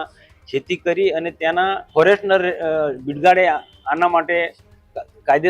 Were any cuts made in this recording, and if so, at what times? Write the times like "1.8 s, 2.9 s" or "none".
1.9 s